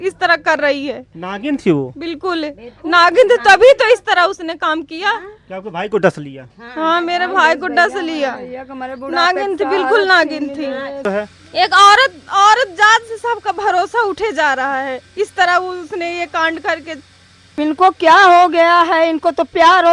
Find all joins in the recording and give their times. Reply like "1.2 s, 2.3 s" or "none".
11.1 s, 17.5 s